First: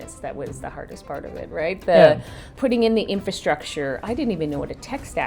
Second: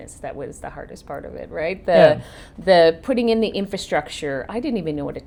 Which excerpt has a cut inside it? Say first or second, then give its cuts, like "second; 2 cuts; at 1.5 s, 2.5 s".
first; 1 cut; at 2.6 s